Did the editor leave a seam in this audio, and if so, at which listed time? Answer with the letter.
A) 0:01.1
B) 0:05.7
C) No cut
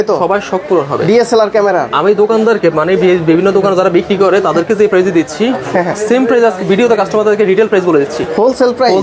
C